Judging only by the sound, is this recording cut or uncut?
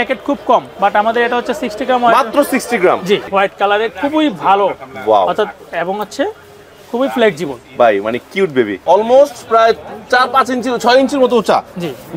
cut